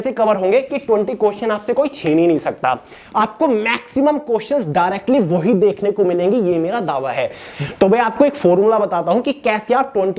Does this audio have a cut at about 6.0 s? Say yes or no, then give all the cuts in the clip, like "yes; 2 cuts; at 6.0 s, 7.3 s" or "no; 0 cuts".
no; 2 cuts; at 3.0 s, 7.5 s